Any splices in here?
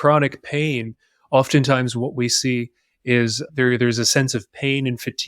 yes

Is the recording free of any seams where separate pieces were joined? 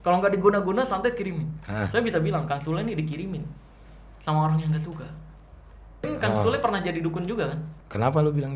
no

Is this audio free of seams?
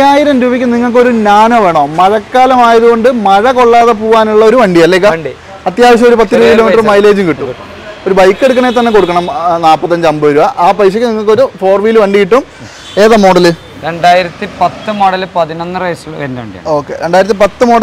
yes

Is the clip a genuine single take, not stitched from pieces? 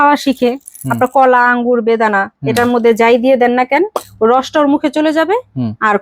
yes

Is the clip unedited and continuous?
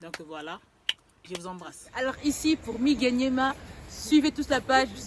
yes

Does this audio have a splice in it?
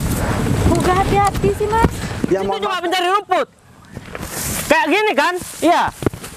yes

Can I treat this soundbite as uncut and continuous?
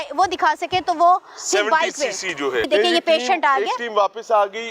no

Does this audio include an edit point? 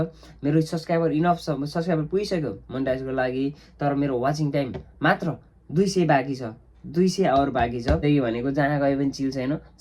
yes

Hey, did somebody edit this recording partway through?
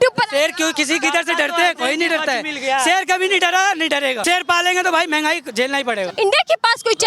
yes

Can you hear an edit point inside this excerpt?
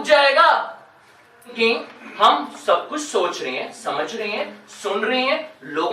yes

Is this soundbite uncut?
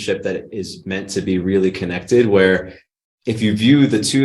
yes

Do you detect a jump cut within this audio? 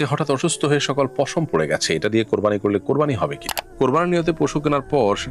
yes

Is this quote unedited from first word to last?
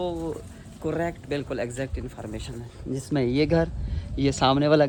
yes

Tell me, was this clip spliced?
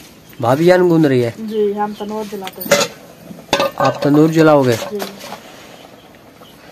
no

